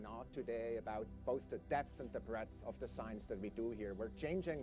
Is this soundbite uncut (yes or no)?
no